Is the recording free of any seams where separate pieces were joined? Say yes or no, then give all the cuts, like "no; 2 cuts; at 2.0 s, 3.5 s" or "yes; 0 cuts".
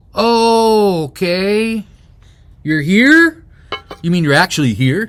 yes; 0 cuts